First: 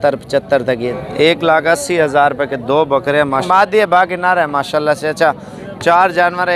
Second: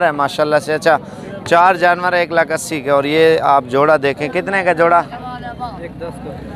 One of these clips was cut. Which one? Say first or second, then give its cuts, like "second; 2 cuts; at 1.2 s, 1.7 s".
first; 2 cuts; at 0.9 s, 3.4 s